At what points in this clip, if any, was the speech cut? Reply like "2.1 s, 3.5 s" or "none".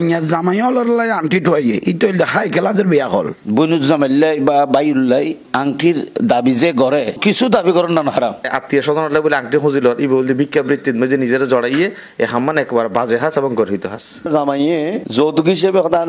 3.4 s, 8.5 s, 14.3 s